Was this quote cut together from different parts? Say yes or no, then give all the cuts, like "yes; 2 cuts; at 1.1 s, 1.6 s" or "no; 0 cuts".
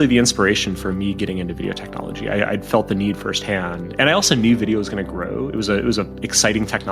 no; 0 cuts